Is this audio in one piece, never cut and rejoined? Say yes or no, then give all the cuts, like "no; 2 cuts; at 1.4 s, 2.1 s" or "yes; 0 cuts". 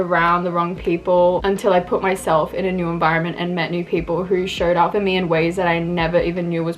no; 2 cuts; at 1.4 s, 4.9 s